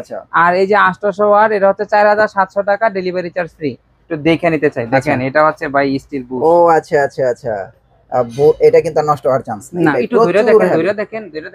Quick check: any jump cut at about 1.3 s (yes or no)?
no